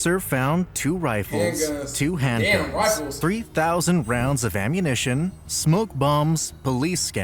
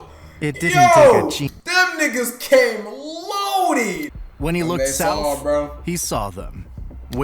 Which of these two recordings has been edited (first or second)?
second